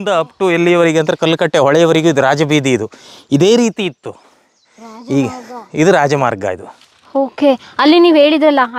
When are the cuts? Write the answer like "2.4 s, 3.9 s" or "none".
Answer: none

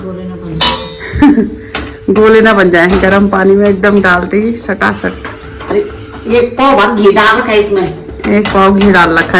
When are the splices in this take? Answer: none

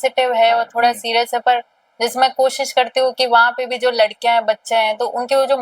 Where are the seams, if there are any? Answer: none

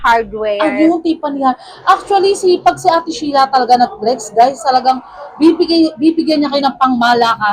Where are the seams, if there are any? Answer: none

